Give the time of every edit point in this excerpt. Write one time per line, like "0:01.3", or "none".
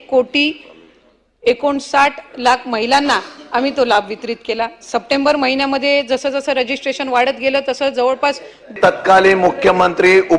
0:08.8